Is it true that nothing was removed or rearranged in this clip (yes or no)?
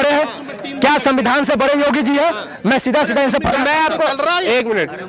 yes